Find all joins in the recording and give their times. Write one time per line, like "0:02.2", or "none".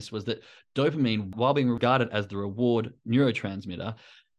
0:01.3